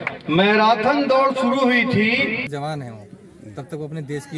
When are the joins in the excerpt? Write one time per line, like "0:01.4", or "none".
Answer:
0:02.5